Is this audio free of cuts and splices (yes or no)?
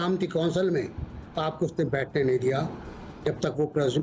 yes